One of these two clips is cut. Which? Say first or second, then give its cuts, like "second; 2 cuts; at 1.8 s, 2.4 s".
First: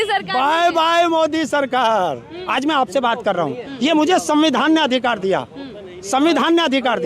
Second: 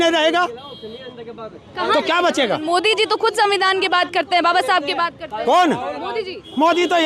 first; 1 cut; at 2.3 s